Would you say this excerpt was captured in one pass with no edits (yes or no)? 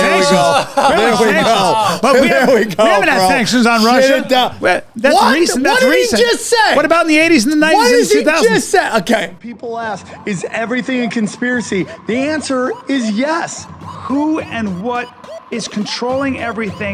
no